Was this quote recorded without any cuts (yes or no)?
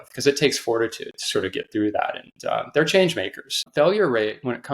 no